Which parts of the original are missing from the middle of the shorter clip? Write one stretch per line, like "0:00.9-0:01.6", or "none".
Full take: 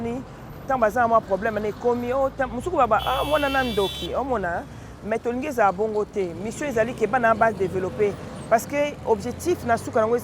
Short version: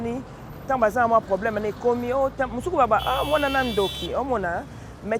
none